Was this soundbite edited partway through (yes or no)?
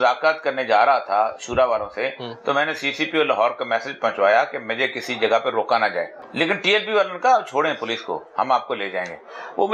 yes